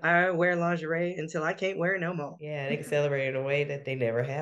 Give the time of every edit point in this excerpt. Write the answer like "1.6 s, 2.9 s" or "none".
2.5 s